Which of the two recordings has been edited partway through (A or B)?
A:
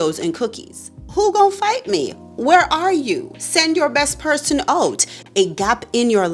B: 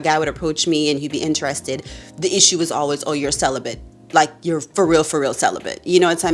A